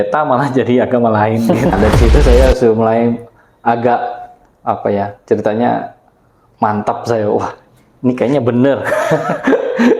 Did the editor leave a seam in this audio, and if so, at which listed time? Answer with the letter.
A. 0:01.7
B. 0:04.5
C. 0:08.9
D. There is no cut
A